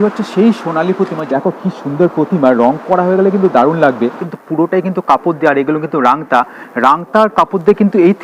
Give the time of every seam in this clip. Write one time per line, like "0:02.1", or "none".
0:01.2
0:04.2